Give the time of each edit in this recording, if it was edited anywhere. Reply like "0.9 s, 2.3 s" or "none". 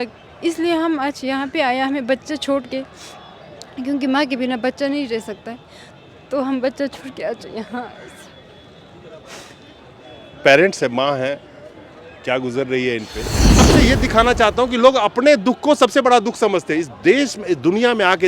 13.7 s